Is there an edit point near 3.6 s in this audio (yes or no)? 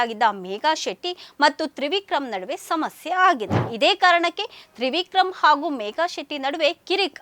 yes